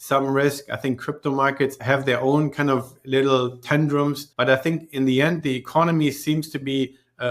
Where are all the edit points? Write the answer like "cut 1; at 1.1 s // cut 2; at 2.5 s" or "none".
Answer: cut 1; at 1.8 s // cut 2; at 4.2 s